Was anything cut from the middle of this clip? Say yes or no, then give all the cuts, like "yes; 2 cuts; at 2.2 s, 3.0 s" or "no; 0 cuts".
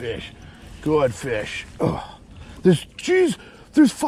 no; 0 cuts